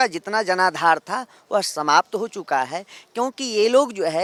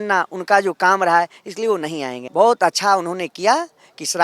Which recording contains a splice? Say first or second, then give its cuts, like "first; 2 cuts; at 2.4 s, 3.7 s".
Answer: second; 1 cut; at 2.2 s